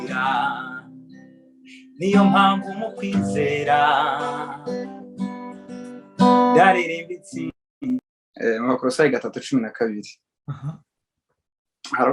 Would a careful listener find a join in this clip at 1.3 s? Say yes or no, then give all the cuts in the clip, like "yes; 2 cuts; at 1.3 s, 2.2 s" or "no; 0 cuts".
no; 1 cut; at 8.2 s